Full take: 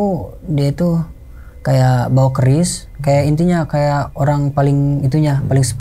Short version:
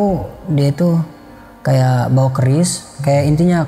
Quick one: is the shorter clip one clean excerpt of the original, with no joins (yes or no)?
yes